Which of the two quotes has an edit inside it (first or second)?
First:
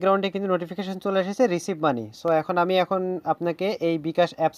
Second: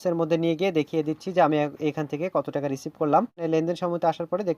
second